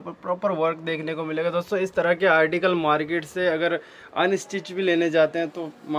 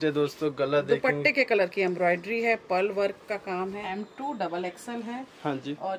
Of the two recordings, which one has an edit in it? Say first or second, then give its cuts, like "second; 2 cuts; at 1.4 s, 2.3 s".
second; 1 cut; at 3.9 s